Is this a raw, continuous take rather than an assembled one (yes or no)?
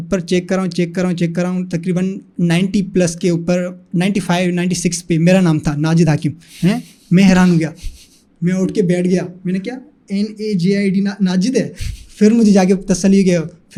yes